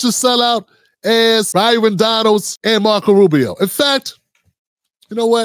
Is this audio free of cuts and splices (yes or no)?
no